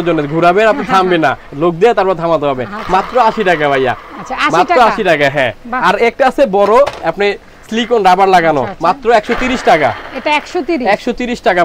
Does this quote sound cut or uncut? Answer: uncut